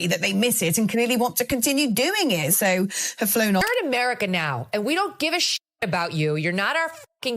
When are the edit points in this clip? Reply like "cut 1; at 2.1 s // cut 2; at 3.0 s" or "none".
cut 1; at 3.5 s